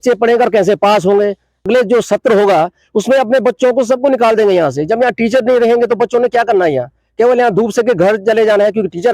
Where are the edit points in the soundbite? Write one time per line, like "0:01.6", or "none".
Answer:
0:01.6